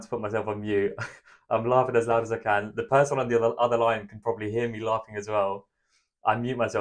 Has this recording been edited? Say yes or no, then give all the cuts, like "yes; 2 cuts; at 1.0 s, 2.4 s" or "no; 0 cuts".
no; 0 cuts